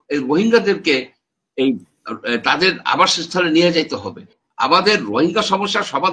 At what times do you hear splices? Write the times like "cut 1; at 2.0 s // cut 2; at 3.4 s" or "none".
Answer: cut 1; at 4.4 s